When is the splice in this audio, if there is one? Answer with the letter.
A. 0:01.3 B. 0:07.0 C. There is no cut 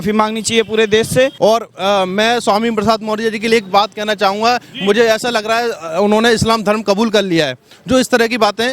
A